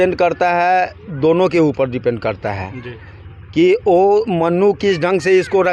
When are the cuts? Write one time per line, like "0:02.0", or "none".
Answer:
none